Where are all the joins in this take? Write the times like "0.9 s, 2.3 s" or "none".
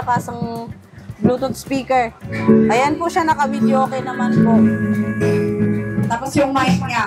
2.3 s, 6.1 s